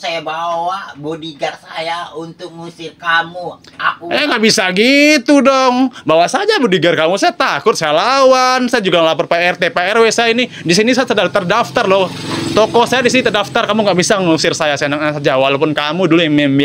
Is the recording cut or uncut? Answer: uncut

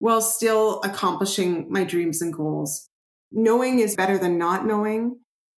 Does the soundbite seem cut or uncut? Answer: cut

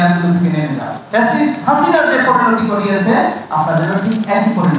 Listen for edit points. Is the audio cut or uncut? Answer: cut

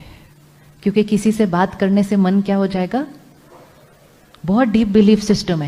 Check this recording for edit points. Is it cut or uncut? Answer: uncut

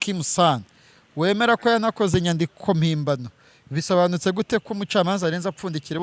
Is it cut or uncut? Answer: uncut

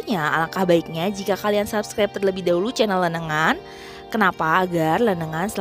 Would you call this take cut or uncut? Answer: uncut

